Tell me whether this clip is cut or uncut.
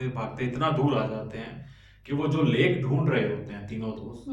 uncut